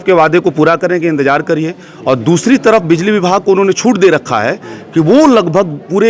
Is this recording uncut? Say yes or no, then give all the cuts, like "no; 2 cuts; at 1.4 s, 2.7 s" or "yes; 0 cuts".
yes; 0 cuts